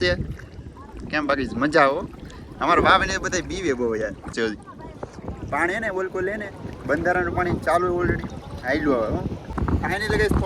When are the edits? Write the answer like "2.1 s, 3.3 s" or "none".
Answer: 4.3 s, 9.4 s